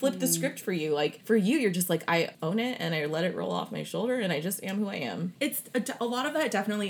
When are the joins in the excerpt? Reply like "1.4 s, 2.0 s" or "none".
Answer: 1.2 s, 2.3 s, 5.3 s